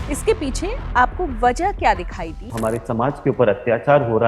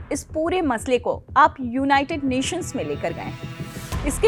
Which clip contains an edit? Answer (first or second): first